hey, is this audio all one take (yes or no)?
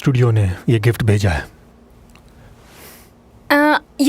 no